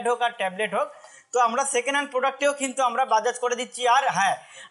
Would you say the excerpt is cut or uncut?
uncut